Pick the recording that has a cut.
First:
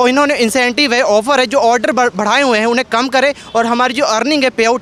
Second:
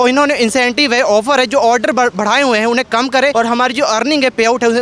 second; 1 cut; at 3.3 s

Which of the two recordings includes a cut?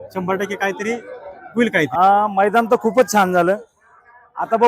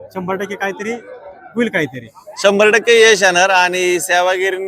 first; 1 cut; at 1.9 s

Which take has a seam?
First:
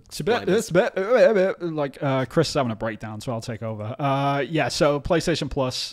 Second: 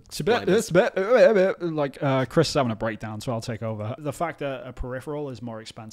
second; 1 cut; at 4.0 s

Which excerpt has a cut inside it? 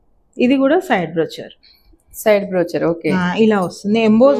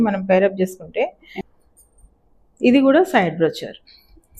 second; 1 cut; at 1.2 s

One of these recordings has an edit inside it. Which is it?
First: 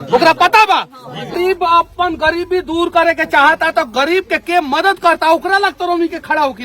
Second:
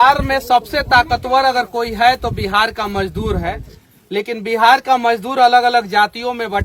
first; 1 cut; at 1.4 s

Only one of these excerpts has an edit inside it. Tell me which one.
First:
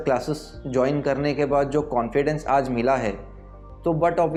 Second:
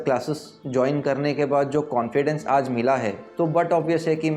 second; 1 cut; at 3.2 s

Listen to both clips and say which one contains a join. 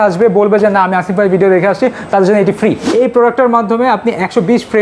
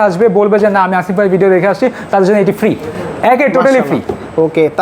first; 1 cut; at 2.8 s

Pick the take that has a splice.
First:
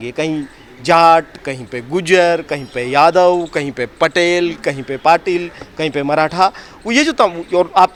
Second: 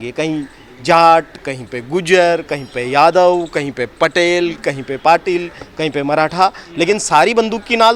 second; 1 cut; at 6.6 s

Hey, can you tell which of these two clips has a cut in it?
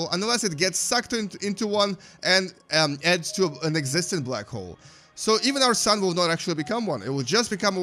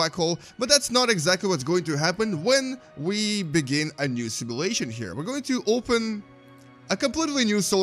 second; 1 cut; at 6.8 s

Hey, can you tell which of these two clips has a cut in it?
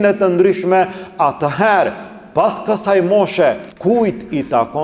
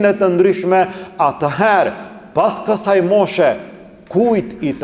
first; 1 cut; at 3.7 s

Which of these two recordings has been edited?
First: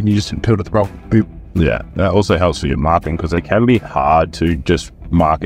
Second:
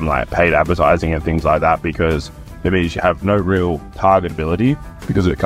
first; 2 cuts; at 1.9 s, 3.4 s

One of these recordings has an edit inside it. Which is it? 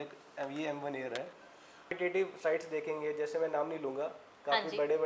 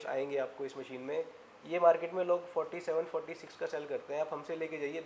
first; 1 cut; at 2.0 s

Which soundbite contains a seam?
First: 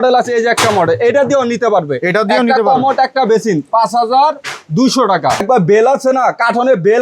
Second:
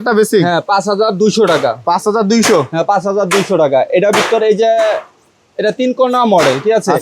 first; 1 cut; at 5.4 s

